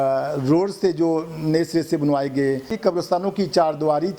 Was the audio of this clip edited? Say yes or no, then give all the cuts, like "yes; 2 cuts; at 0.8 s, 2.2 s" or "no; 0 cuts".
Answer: yes; 1 cut; at 2.7 s